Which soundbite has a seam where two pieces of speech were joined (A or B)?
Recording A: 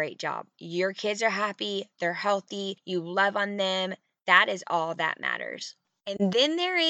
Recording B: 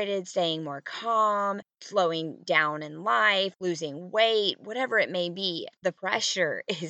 A